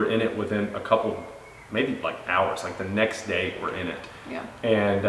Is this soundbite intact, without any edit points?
yes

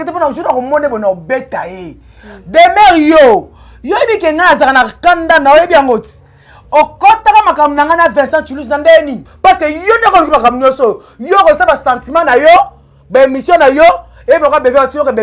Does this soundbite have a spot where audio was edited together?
yes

